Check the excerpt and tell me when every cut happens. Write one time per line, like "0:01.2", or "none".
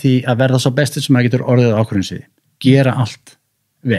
none